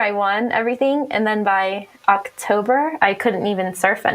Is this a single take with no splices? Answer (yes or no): no